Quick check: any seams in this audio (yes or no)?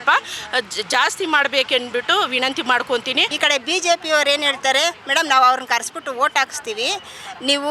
yes